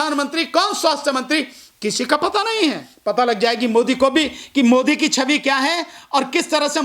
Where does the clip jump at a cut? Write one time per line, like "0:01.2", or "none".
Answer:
0:03.0